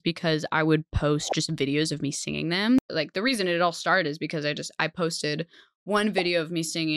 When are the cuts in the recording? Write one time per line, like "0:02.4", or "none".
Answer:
0:02.8